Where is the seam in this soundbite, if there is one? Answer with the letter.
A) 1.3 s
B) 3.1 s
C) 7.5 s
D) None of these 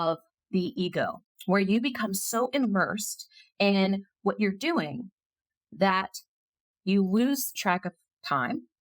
A